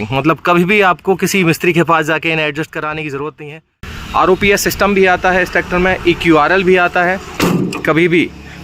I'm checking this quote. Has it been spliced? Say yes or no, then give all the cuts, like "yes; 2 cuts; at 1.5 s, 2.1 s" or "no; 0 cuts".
yes; 2 cuts; at 3.9 s, 7.3 s